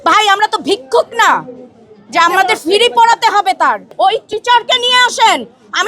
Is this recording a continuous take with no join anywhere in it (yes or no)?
no